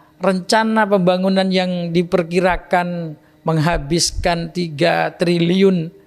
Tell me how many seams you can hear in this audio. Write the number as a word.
zero